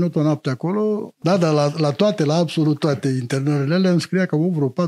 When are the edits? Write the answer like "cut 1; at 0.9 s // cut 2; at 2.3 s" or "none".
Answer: cut 1; at 1.2 s